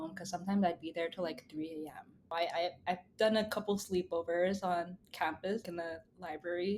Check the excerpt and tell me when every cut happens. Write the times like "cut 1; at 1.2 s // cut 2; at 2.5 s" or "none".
cut 1; at 2.3 s // cut 2; at 5.6 s